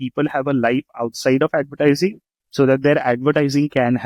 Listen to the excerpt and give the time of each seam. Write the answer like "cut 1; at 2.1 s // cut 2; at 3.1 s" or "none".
none